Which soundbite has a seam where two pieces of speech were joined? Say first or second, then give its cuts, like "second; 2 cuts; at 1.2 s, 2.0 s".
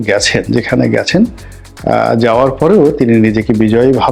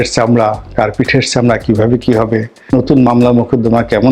second; 1 cut; at 2.7 s